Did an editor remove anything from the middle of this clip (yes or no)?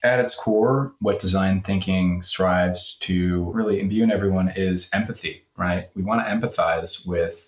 yes